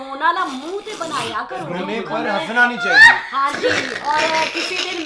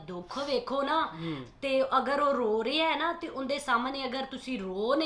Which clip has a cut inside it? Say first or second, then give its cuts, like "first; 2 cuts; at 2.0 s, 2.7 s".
first; 1 cut; at 1.7 s